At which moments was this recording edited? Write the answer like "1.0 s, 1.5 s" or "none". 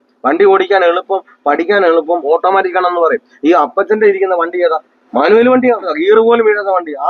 4.9 s, 5.9 s